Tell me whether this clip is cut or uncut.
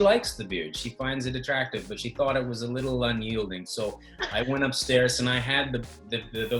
uncut